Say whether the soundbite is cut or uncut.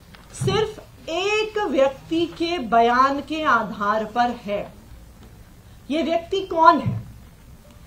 uncut